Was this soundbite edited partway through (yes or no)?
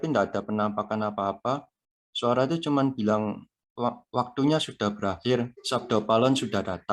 yes